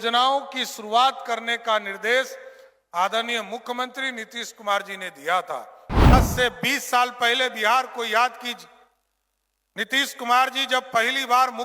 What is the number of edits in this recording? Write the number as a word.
one